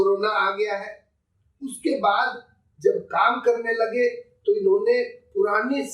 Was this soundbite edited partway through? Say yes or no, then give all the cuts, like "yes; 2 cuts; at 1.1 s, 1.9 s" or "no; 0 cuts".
no; 0 cuts